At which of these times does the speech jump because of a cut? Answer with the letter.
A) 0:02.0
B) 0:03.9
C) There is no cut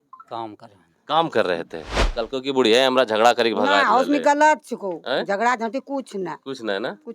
A